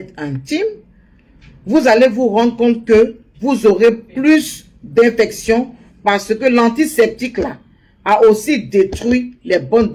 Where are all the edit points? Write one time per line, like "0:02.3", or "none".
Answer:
none